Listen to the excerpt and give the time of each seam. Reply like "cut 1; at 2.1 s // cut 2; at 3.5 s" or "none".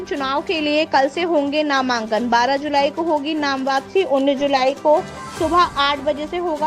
none

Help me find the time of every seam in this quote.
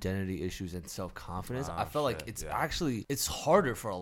cut 1; at 3.0 s

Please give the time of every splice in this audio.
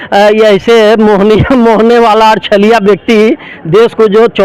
none

